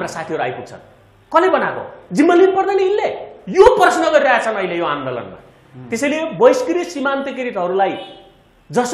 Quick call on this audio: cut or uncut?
uncut